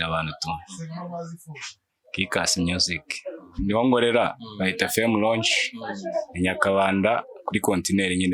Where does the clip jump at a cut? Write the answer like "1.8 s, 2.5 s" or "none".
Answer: 3.6 s